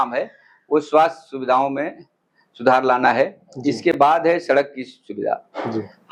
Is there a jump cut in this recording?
no; 0 cuts

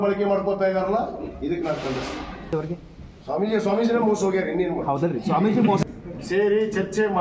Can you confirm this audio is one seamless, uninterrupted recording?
no; 2 cuts; at 2.5 s, 5.8 s

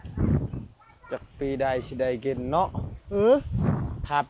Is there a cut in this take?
no; 0 cuts

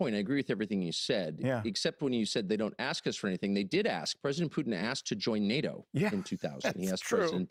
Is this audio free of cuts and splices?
yes; 0 cuts

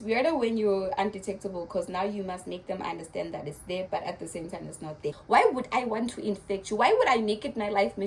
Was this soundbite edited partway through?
yes; 1 cut; at 5.2 s

